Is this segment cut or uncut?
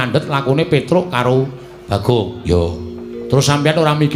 uncut